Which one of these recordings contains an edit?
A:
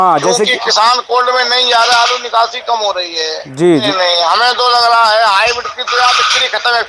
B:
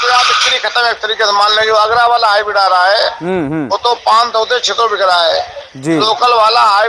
A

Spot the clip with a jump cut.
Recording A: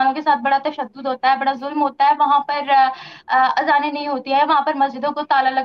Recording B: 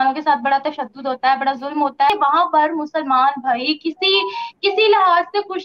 B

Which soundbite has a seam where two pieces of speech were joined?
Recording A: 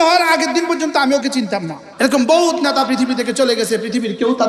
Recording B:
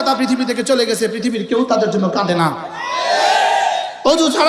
A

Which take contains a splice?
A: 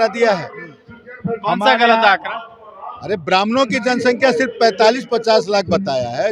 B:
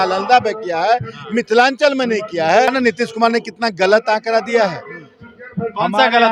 B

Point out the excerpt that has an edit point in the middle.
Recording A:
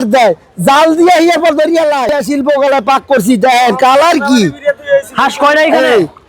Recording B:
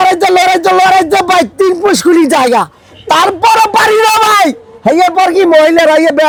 A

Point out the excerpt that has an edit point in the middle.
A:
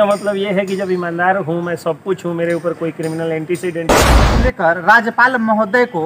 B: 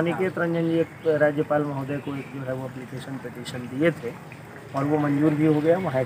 A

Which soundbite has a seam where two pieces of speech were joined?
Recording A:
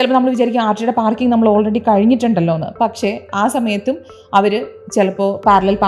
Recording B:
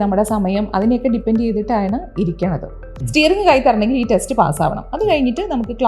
B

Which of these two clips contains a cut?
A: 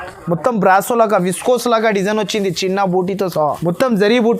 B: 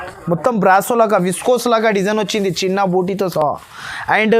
A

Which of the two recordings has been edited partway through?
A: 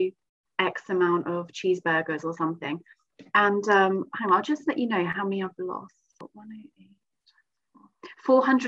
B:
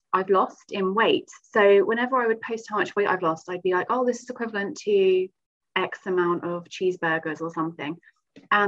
A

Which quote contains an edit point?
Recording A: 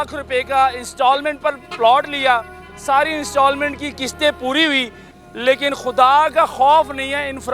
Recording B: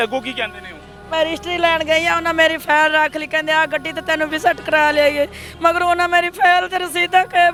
A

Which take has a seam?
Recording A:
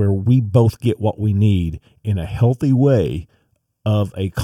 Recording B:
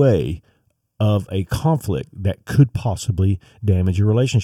A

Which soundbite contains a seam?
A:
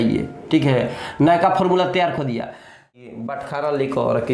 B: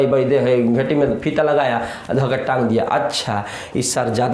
A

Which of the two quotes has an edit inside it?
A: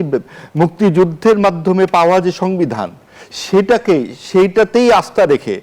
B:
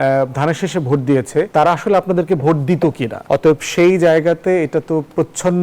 B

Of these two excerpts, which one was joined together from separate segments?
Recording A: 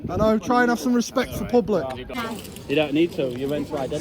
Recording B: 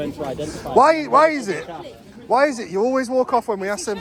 A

